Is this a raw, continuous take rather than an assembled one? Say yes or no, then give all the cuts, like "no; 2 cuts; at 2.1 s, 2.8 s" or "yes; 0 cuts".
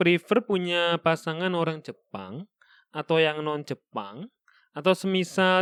yes; 0 cuts